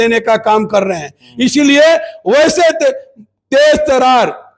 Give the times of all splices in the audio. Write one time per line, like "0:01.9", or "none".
none